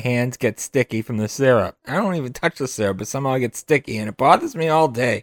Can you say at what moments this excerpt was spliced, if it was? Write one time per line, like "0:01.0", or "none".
none